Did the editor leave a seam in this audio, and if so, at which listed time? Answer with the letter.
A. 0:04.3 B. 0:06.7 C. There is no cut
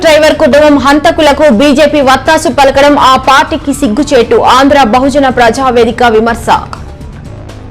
B